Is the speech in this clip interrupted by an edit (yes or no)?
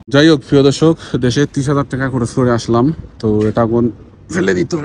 no